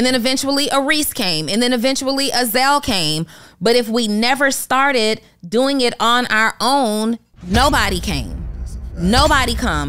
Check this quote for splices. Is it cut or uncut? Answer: uncut